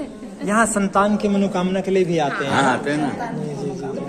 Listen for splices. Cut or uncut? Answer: uncut